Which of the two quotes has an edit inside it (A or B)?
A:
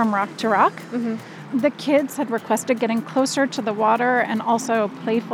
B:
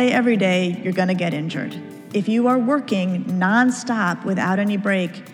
A